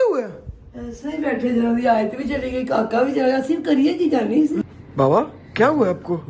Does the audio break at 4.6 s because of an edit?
yes; 1 cut; at 4.6 s

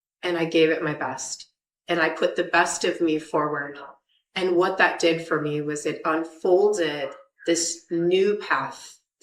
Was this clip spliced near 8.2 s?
no; 0 cuts

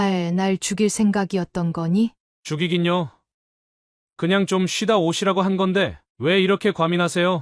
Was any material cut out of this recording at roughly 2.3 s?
yes; 1 cut; at 2.3 s

